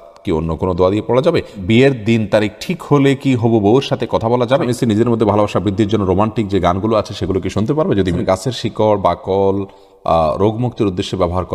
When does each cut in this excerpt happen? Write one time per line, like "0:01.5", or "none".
0:01.6
0:04.7
0:08.2